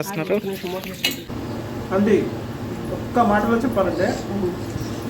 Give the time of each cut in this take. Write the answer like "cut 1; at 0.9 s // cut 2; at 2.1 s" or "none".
cut 1; at 1.3 s